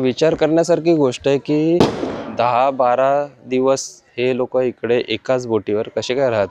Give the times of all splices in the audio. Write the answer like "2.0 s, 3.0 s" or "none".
none